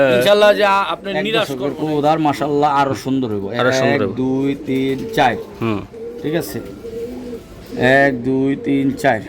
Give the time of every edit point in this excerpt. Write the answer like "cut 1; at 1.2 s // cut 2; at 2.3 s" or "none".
cut 1; at 1.6 s